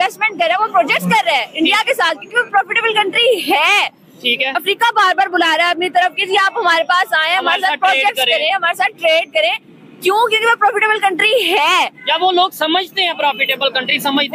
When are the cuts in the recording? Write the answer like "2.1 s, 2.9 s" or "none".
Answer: none